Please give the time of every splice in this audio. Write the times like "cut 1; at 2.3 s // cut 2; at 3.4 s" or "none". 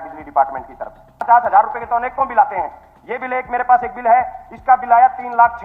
cut 1; at 1.2 s